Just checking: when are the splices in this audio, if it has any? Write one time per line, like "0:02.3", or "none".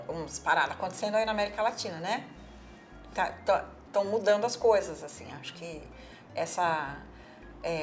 none

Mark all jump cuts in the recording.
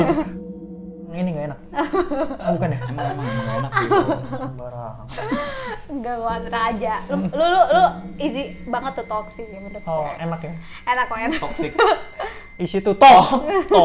0:00.9

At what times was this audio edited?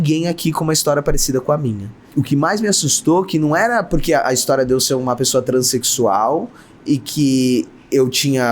0:02.0

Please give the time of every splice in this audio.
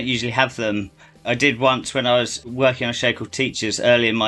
0:01.2
0:02.4

